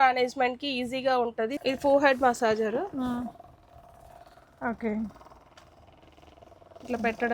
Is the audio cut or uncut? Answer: cut